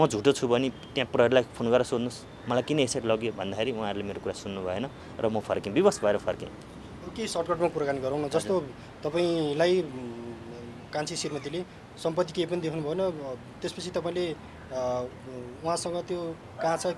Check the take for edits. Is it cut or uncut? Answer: uncut